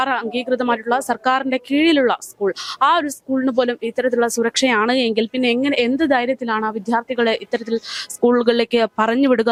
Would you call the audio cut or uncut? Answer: uncut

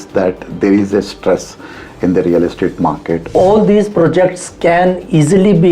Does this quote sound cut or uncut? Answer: cut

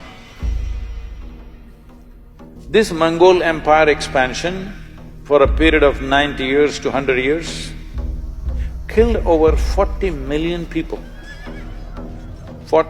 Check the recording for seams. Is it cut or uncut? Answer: cut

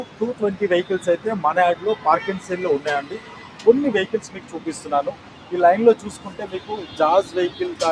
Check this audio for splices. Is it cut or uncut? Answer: uncut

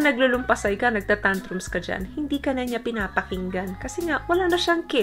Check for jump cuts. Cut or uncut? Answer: uncut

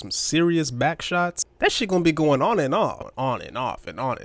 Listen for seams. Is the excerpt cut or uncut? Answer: cut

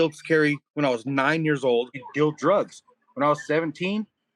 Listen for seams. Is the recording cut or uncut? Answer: cut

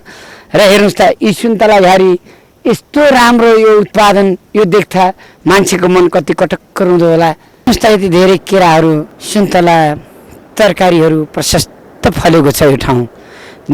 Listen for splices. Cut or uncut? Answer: uncut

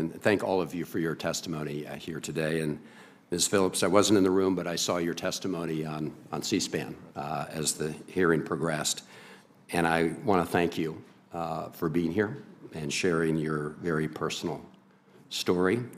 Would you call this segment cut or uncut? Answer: cut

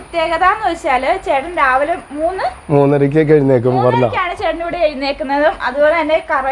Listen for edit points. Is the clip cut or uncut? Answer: uncut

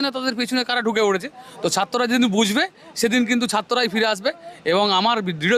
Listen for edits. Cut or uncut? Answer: uncut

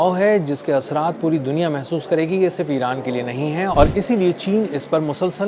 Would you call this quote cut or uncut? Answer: uncut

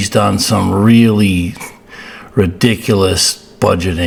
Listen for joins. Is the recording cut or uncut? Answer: uncut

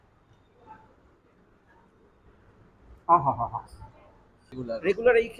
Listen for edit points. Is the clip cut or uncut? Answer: cut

